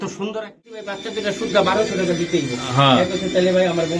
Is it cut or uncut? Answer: cut